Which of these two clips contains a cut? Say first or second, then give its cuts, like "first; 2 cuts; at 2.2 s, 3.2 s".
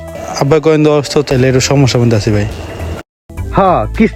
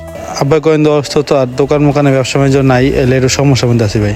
first; 1 cut; at 1.3 s